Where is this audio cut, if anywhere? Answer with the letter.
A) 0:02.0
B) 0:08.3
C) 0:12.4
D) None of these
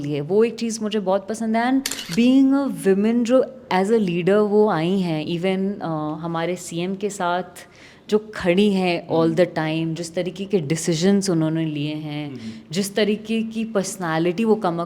A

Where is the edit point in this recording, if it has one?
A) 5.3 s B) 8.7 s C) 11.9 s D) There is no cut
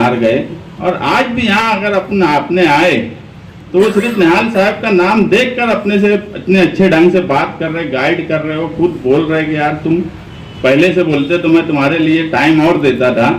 D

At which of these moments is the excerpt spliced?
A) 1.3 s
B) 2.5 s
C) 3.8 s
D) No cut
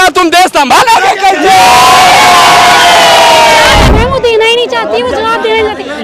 C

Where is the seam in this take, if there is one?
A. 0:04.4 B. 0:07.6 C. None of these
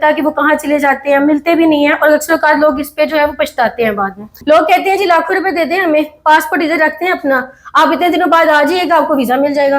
A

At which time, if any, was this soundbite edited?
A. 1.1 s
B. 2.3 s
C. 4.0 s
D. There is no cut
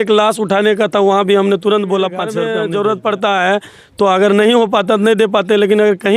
B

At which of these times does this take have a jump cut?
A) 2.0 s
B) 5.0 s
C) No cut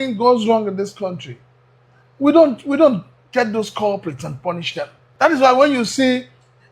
B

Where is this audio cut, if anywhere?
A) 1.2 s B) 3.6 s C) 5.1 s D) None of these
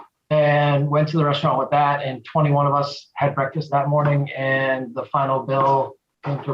B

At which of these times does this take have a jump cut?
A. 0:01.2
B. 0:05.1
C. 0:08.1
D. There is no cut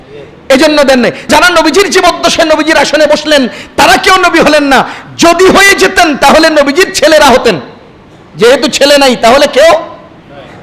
A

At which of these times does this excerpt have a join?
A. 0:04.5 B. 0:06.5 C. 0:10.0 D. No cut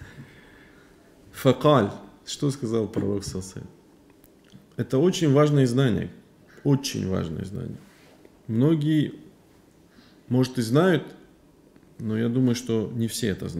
A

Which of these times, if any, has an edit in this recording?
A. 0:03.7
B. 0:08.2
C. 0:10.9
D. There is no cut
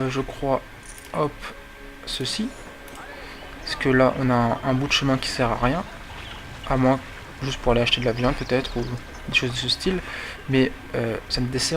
B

